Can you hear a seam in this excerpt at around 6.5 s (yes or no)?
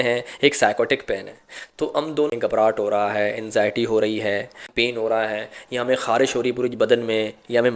no